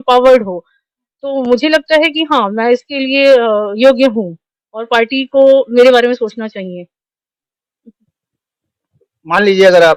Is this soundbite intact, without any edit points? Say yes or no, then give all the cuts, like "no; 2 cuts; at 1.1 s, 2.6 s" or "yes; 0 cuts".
yes; 0 cuts